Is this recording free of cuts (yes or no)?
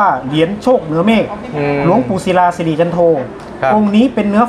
yes